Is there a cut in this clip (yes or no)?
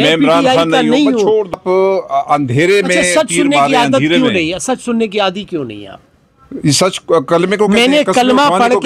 yes